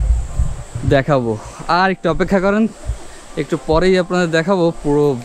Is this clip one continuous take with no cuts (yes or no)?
yes